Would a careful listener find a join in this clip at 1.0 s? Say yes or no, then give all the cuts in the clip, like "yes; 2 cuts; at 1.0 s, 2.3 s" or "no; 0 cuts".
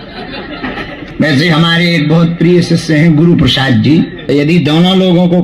yes; 2 cuts; at 1.0 s, 4.2 s